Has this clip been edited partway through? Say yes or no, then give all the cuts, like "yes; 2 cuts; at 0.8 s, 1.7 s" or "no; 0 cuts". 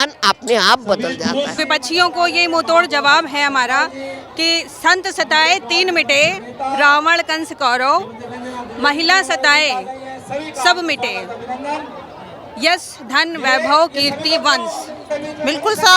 yes; 2 cuts; at 1.6 s, 15.0 s